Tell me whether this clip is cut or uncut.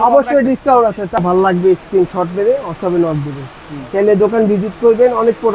cut